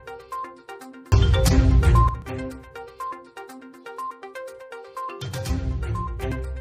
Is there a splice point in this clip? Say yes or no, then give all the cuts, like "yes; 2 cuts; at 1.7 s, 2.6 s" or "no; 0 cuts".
no; 0 cuts